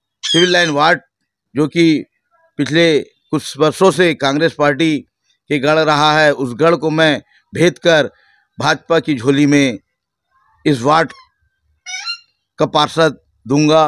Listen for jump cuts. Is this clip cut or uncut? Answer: uncut